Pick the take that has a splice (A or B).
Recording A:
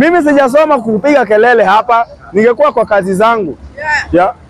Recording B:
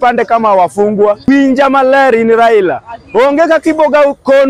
B